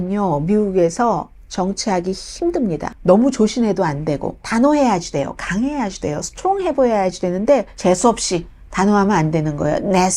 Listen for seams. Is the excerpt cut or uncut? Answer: cut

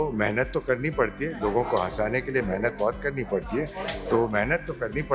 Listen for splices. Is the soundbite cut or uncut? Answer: uncut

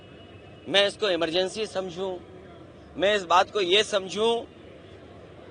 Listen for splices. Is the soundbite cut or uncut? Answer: uncut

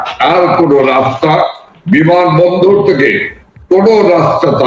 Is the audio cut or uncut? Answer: uncut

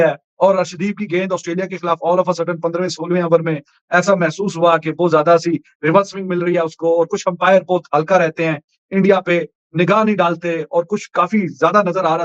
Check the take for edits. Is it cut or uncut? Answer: uncut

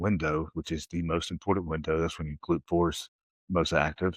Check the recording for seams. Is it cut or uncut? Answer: uncut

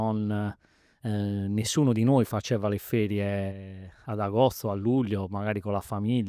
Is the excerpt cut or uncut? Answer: uncut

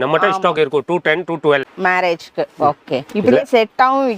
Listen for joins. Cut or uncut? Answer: cut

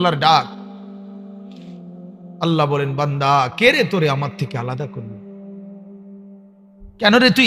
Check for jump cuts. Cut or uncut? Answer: uncut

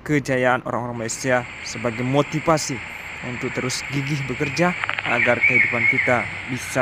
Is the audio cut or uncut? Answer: uncut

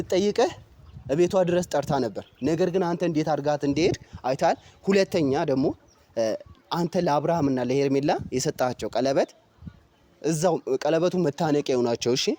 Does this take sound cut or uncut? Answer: uncut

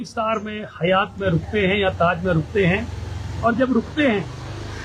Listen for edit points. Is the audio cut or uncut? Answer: uncut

